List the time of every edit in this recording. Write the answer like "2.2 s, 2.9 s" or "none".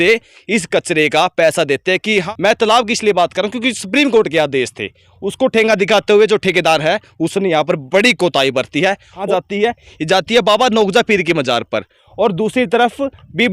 2.2 s, 9.2 s